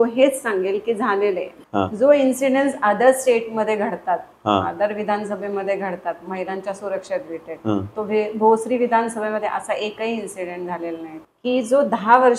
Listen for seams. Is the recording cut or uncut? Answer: cut